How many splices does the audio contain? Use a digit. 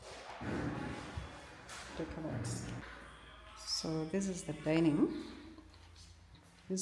1